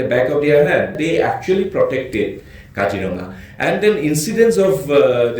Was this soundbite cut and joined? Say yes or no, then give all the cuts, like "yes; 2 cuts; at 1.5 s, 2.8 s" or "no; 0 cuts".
yes; 1 cut; at 1.0 s